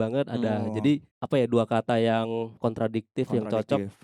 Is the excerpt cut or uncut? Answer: cut